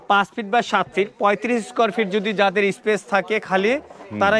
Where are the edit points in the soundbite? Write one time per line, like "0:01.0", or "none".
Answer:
none